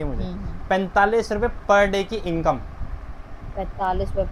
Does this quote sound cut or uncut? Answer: uncut